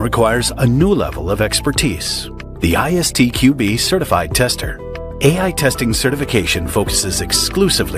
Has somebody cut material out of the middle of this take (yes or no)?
yes